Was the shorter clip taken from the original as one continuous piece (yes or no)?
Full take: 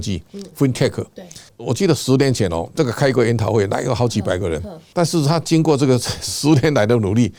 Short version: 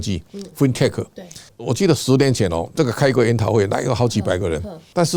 yes